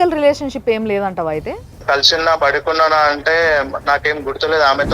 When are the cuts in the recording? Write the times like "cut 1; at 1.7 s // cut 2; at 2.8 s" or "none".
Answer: cut 1; at 1.8 s